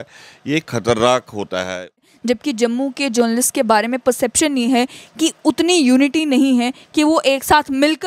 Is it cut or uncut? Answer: cut